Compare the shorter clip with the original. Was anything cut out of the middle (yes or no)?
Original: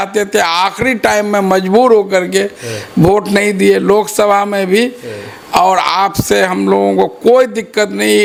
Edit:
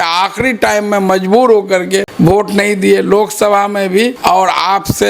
yes